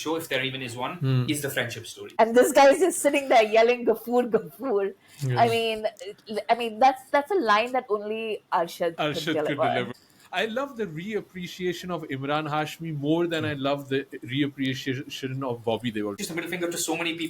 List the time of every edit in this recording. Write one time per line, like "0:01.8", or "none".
0:02.0
0:09.9
0:16.2